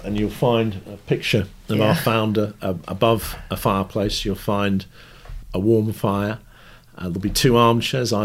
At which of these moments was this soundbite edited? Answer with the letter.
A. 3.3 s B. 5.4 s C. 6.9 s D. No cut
B